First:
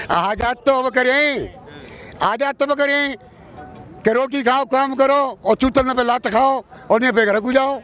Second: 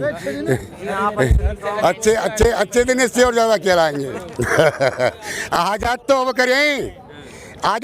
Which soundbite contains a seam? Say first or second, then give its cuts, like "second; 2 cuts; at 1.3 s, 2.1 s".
second; 1 cut; at 4.2 s